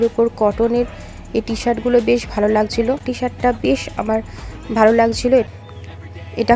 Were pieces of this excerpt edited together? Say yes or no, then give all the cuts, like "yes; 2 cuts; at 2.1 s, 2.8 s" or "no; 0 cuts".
yes; 2 cuts; at 3.1 s, 5.5 s